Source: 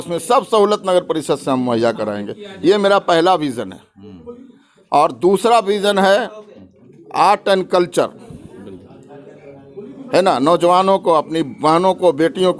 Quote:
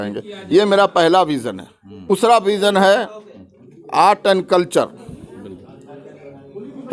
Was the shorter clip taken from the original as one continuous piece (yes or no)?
no